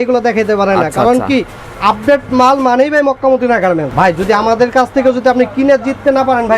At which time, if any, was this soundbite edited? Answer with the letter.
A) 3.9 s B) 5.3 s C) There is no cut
A